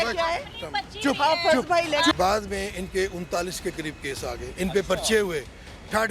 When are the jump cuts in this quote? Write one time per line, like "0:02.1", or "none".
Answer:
0:02.1